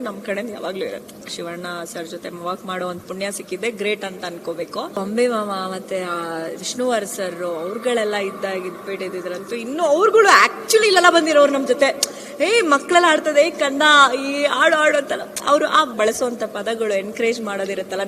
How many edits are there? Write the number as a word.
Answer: three